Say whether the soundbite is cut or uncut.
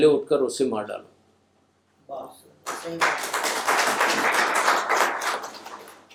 uncut